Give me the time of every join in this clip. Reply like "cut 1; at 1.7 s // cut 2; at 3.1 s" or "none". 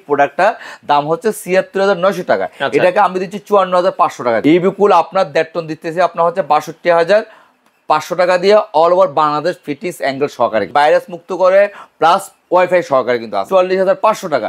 cut 1; at 4.4 s // cut 2; at 10.7 s // cut 3; at 13.4 s